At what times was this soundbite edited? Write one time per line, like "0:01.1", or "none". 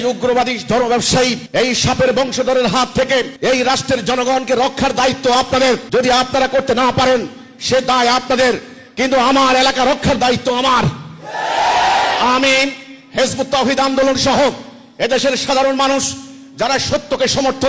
0:01.4
0:03.3
0:05.8